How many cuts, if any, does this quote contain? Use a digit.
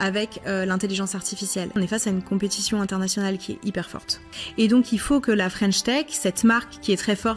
2